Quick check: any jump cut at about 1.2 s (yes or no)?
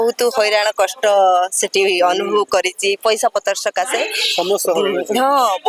no